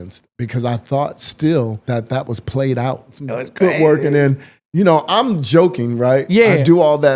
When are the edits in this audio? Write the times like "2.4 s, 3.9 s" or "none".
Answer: 1.8 s, 3.2 s